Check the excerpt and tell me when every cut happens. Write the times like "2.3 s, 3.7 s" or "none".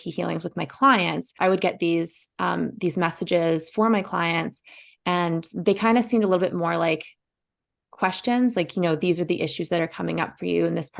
1.3 s